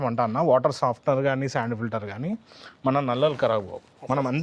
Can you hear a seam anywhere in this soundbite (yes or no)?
no